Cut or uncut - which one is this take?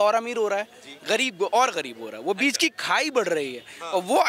uncut